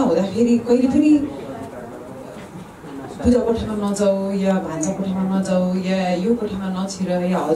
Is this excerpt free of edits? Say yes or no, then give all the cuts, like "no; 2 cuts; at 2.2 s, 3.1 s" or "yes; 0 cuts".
yes; 0 cuts